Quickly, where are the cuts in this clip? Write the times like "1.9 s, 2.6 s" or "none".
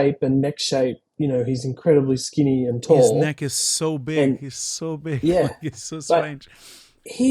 none